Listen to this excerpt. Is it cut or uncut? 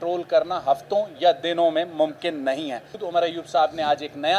cut